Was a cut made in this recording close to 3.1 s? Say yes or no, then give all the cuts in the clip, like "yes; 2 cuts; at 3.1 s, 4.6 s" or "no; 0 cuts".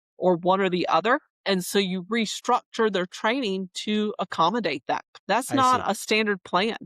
no; 2 cuts; at 1.3 s, 5.1 s